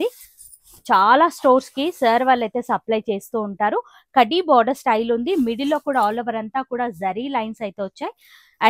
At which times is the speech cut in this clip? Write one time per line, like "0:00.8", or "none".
none